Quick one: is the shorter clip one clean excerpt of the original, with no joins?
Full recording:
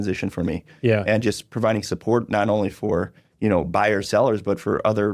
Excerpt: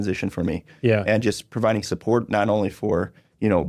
yes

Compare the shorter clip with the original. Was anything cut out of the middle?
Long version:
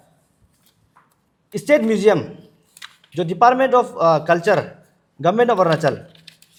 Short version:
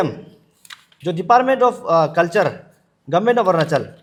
no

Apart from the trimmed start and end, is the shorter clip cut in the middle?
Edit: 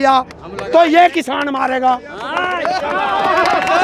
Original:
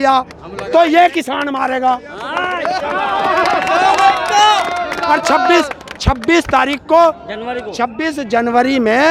no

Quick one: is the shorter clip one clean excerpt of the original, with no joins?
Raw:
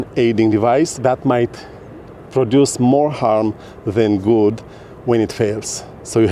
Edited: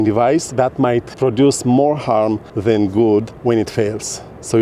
no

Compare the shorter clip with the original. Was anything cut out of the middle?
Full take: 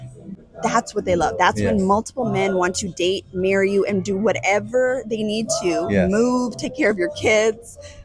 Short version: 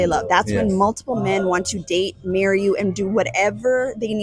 no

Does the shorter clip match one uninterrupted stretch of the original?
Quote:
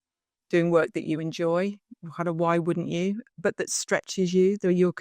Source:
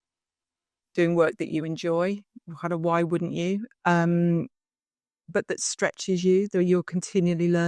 no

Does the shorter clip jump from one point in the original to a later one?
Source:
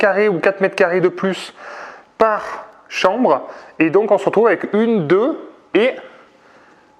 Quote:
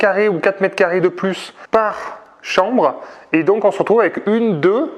yes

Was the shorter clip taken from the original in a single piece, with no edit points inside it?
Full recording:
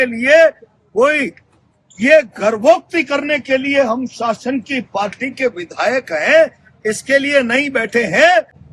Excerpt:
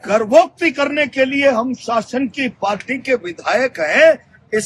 yes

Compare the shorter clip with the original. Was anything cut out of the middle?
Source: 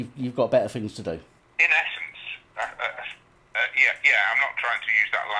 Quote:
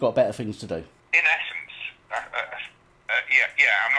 yes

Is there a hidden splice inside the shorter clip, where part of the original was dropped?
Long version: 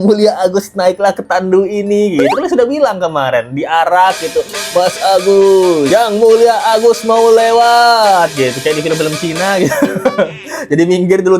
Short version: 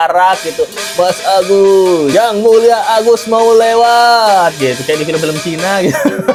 no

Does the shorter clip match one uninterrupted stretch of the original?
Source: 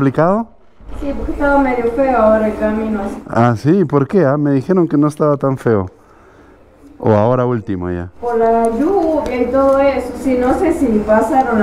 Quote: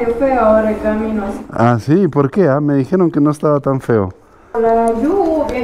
no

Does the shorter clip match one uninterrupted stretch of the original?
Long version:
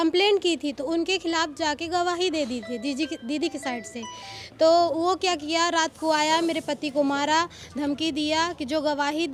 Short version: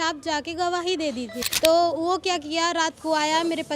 no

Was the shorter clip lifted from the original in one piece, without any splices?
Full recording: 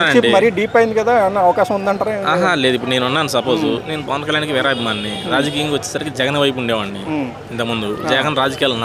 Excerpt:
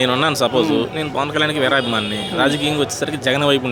yes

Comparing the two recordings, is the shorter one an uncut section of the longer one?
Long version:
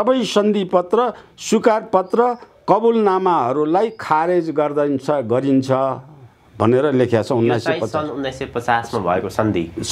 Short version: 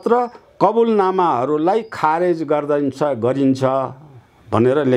yes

